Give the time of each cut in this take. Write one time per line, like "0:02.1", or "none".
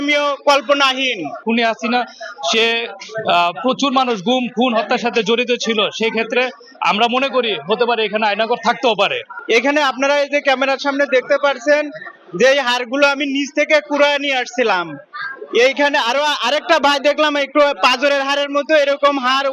0:01.4
0:09.3